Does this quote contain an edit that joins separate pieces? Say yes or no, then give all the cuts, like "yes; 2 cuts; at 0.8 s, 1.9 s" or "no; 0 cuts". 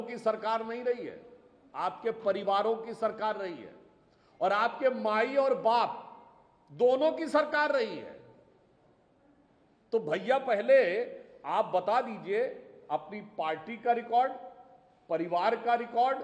no; 0 cuts